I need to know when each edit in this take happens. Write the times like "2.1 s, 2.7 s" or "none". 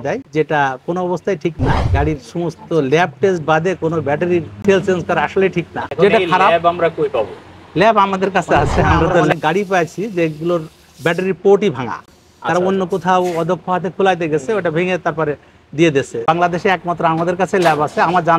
5.8 s, 9.3 s, 16.2 s